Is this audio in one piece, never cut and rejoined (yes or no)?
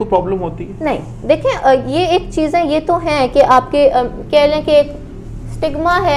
yes